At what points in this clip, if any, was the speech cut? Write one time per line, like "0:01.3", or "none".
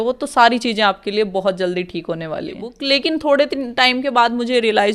0:02.7